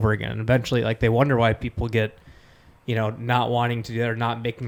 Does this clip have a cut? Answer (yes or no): no